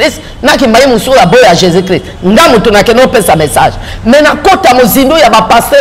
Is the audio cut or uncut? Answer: uncut